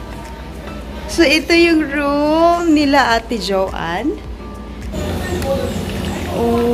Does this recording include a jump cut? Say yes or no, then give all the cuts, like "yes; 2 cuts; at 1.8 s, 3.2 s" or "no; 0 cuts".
yes; 1 cut; at 5.0 s